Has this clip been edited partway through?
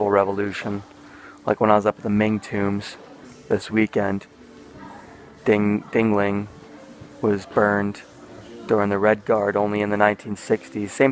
no; 0 cuts

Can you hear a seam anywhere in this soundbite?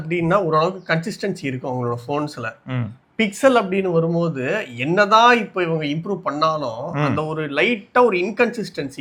no; 0 cuts

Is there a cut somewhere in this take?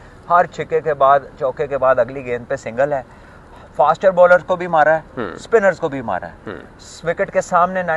no; 0 cuts

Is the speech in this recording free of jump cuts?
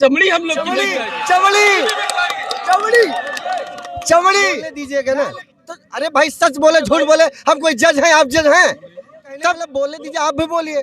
no; 3 cuts; at 0.9 s, 4.5 s, 9.6 s

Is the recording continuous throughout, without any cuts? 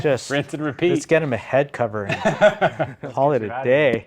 no; 1 cut; at 3.0 s

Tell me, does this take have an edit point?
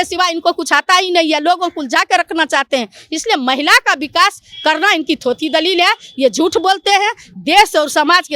no; 0 cuts

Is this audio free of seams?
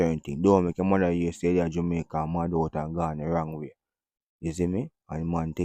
yes; 0 cuts

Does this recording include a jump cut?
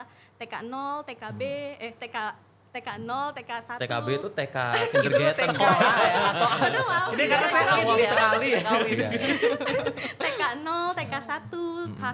no; 0 cuts

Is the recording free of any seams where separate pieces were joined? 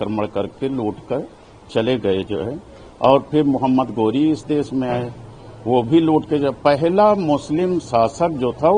yes; 0 cuts

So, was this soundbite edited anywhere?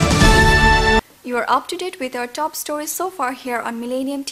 no; 0 cuts

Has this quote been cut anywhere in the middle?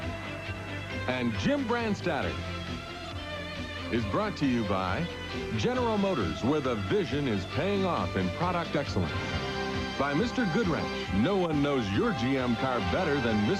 no; 0 cuts

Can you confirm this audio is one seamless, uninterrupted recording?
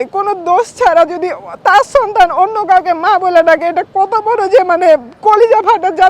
yes; 0 cuts

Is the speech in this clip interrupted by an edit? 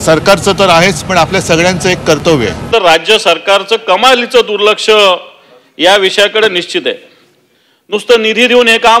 yes; 1 cut; at 2.7 s

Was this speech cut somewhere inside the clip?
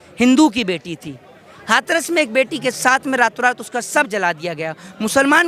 no; 0 cuts

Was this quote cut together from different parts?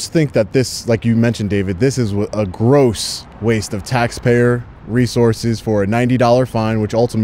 no; 0 cuts

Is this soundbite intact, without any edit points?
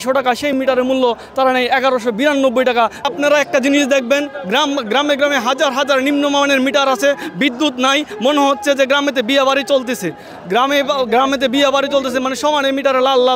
yes; 0 cuts

